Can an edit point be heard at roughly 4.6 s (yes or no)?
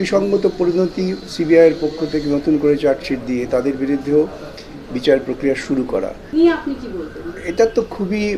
no